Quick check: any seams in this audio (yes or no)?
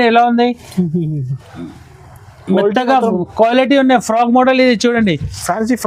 no